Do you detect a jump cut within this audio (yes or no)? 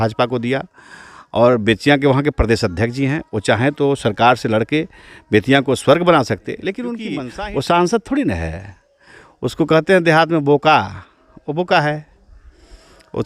yes